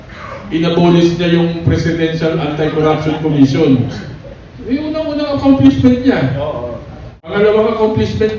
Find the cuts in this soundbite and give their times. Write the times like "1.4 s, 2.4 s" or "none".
7.2 s